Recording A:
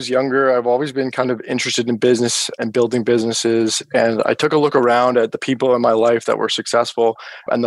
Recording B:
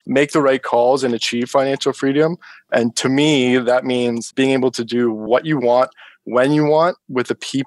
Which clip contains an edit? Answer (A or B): B